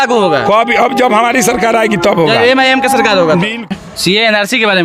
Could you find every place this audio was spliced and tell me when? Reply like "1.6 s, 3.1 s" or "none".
3.7 s